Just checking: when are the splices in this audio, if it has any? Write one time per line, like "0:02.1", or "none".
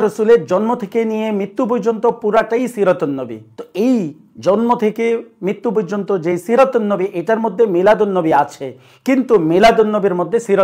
none